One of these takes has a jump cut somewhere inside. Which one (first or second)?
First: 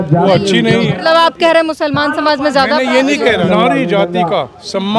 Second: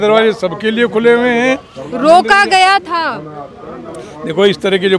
first